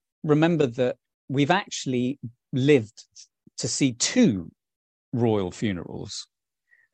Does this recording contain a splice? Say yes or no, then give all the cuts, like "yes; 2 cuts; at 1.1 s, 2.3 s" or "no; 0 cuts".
no; 0 cuts